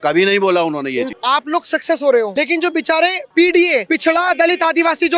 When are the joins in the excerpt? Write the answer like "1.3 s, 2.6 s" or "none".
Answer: 1.1 s, 2.3 s, 3.8 s